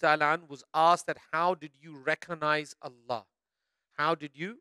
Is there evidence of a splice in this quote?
no; 0 cuts

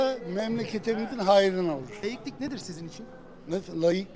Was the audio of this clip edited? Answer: yes; 1 cut; at 2.0 s

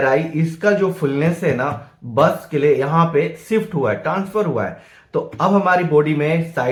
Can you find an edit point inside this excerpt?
no; 0 cuts

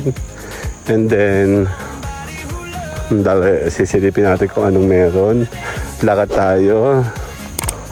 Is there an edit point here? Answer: no; 0 cuts

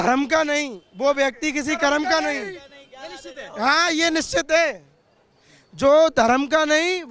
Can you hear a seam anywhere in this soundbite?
no; 0 cuts

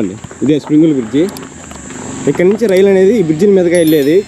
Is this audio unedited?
yes; 0 cuts

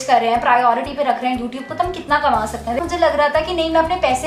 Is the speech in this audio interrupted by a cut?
yes; 1 cut; at 2.8 s

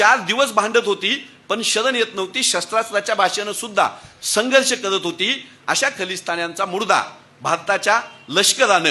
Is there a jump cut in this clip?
no; 0 cuts

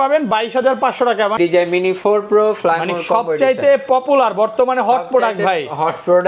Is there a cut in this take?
yes; 1 cut; at 1.4 s

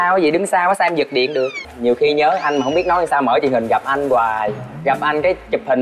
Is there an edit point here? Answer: yes; 1 cut; at 1.7 s

